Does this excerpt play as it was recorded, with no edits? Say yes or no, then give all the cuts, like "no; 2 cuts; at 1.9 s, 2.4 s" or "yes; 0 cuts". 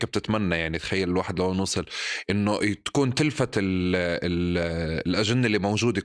yes; 0 cuts